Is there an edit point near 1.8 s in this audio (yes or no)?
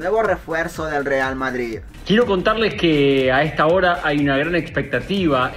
yes